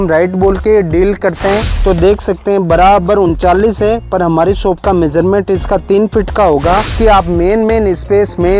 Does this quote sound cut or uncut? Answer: cut